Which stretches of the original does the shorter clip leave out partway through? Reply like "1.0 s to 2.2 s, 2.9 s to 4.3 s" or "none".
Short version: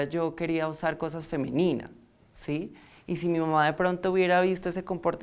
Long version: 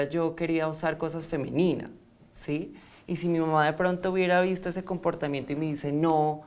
none